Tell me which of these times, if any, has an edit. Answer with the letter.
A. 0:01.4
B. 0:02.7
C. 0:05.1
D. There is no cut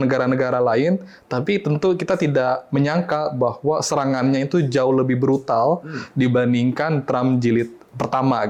D